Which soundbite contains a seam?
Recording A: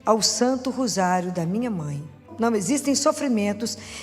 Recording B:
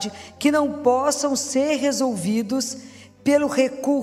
A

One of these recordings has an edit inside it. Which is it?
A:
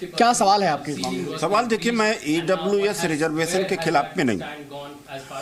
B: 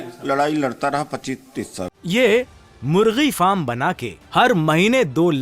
B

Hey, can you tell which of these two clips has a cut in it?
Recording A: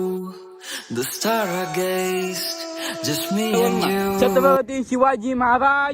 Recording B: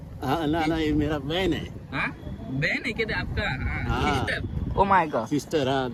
A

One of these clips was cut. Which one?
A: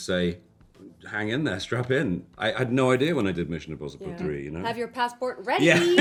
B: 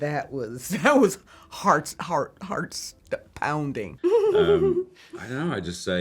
B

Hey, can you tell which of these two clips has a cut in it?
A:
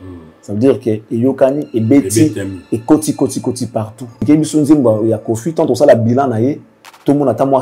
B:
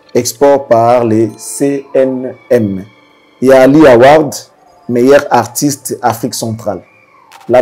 A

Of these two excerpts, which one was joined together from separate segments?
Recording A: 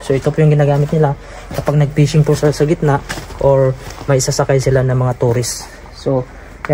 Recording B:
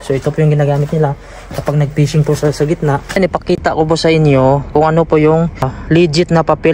B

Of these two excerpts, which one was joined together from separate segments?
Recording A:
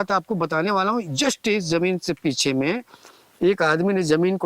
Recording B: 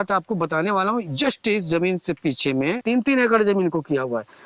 B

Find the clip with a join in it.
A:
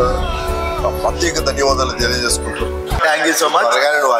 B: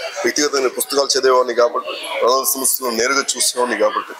A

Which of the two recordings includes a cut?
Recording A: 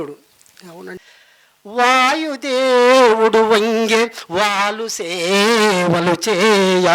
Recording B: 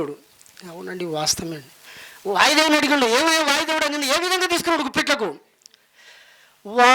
A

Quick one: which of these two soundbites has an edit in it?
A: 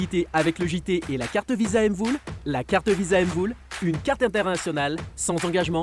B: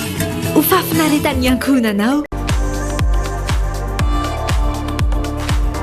B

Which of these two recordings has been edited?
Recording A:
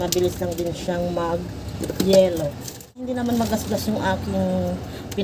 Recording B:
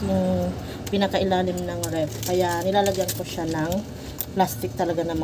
A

